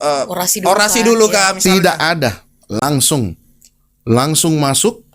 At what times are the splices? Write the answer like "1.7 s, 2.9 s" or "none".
none